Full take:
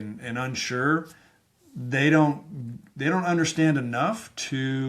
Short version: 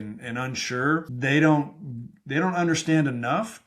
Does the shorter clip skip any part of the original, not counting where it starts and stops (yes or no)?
yes